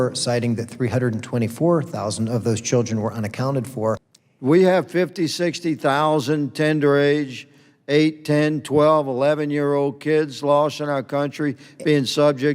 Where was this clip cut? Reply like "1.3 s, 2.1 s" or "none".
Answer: 4.0 s